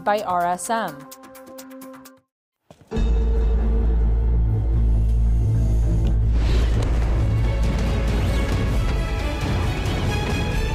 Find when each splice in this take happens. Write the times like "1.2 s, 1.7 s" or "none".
1.0 s, 2.0 s